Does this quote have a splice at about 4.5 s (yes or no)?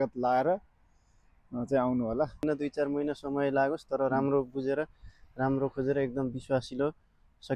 no